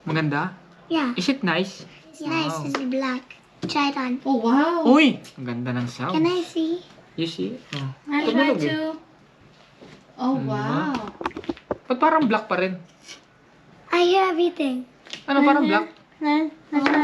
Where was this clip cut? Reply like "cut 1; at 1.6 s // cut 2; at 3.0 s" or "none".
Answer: cut 1; at 2.2 s

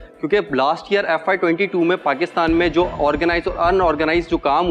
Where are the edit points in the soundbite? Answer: none

